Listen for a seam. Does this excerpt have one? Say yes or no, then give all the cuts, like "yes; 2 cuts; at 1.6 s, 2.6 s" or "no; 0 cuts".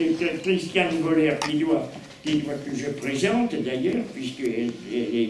yes; 1 cut; at 3.9 s